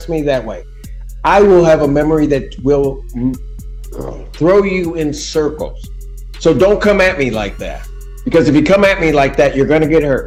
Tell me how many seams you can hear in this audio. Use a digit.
0